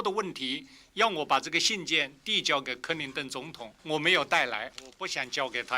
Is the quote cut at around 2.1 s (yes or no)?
no